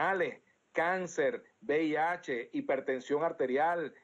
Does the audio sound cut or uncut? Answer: cut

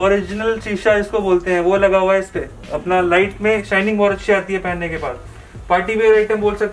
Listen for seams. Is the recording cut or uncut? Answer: uncut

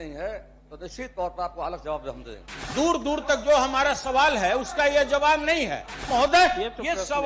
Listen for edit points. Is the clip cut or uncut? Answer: cut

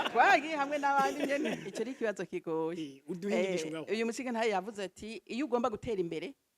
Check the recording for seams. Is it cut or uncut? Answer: cut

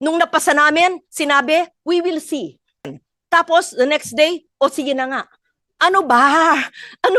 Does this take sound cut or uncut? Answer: cut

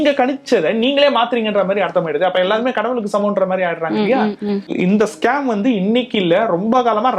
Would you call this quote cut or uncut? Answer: cut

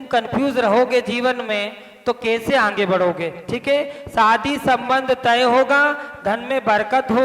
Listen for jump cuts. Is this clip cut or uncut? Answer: uncut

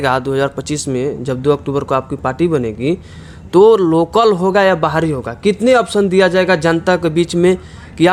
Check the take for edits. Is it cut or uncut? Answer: uncut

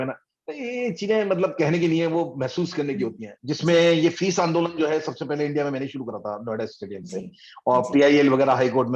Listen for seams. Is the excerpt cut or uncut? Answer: cut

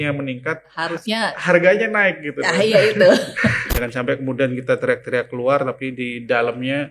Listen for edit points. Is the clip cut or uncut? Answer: cut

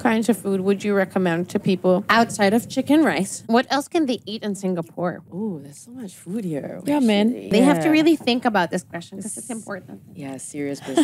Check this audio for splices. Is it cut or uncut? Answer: cut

